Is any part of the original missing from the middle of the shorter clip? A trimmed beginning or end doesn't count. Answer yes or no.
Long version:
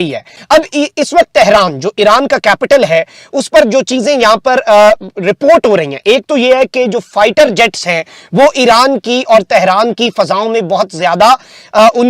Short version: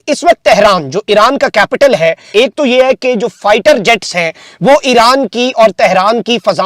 yes